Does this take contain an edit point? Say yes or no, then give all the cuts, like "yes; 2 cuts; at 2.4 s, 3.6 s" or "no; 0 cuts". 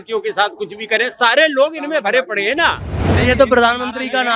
yes; 1 cut; at 3.1 s